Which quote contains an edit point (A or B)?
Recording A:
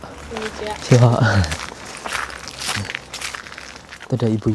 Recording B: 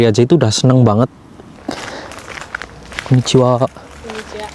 B